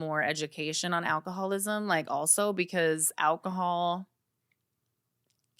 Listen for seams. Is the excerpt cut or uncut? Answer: uncut